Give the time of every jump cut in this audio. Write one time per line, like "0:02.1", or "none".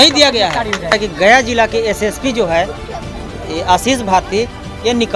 0:00.9